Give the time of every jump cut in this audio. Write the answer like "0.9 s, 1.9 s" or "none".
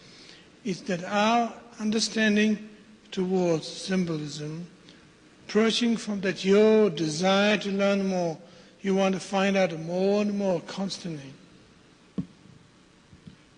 none